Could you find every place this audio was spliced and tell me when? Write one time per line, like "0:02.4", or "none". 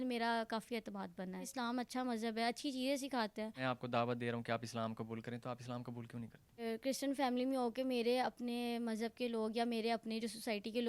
0:01.5
0:03.6
0:06.6